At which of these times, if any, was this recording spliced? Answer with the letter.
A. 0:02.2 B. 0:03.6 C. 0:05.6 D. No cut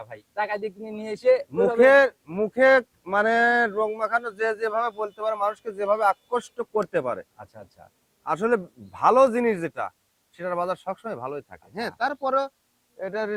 D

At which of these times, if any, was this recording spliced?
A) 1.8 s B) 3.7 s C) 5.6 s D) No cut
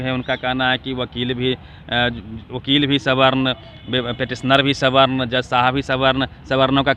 D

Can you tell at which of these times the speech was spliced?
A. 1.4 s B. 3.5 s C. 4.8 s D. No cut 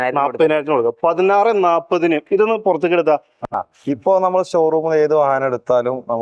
B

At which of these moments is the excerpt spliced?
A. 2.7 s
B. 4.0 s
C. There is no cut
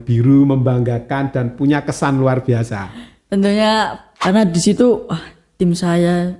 B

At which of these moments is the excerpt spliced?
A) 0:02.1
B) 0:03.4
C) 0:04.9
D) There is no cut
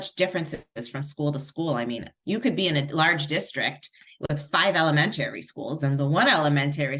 A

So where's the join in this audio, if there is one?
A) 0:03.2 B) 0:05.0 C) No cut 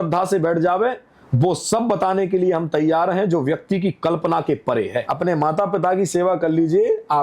B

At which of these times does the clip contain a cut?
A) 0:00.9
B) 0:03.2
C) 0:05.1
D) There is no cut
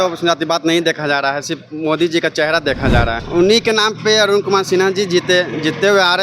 B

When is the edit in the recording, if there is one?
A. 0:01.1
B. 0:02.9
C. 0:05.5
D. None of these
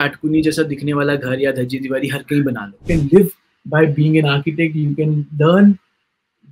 B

